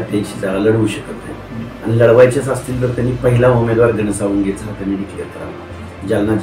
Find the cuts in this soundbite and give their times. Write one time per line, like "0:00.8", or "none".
none